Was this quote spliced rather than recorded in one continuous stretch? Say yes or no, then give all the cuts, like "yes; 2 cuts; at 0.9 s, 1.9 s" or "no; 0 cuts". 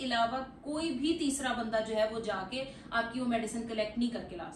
no; 0 cuts